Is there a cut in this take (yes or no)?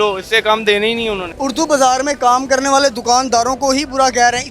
yes